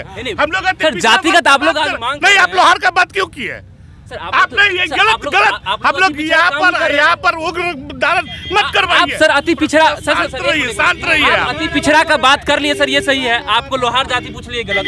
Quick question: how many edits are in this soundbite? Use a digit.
0